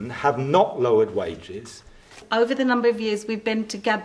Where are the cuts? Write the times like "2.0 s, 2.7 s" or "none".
2.1 s